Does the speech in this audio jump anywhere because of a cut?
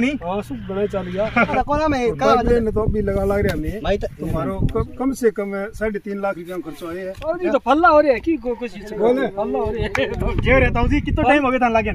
yes; 2 cuts; at 1.5 s, 7.3 s

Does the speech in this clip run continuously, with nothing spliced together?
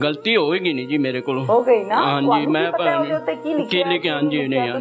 yes; 0 cuts

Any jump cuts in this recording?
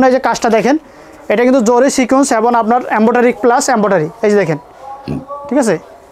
no; 0 cuts

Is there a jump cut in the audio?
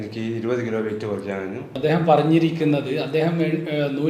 yes; 1 cut; at 1.7 s

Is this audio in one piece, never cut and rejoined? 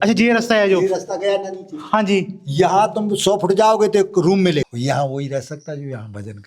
no; 1 cut; at 4.7 s

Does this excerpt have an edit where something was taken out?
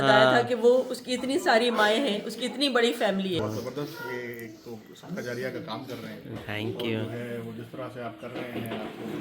yes; 1 cut; at 3.4 s

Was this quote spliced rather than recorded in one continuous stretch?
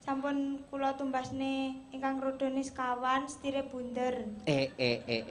no; 0 cuts

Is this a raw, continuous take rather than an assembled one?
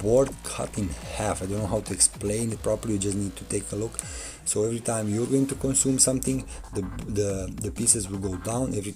yes; 0 cuts

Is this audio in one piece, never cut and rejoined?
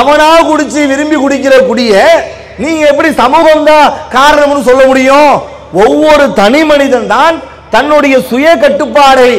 yes; 0 cuts

